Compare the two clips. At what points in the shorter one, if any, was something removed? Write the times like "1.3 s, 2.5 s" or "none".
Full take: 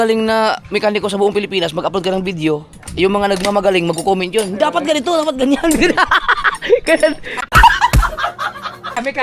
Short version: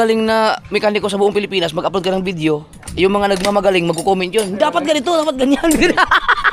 none